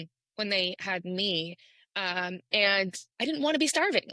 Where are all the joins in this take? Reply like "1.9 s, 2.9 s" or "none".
3.1 s